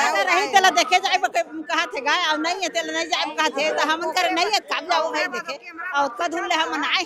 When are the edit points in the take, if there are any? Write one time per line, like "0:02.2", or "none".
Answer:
none